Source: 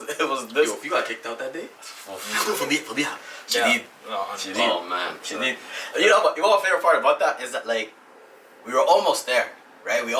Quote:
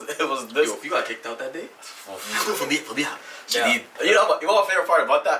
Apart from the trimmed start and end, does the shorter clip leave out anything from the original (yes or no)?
yes